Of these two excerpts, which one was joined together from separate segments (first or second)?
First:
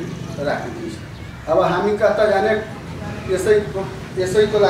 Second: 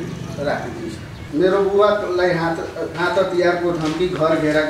second